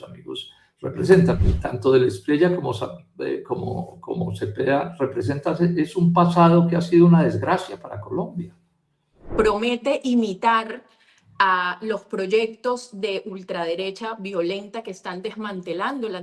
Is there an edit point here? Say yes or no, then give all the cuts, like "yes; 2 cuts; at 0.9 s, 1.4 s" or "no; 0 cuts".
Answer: yes; 2 cuts; at 1.4 s, 9.2 s